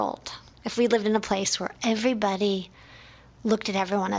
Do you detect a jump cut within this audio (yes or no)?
no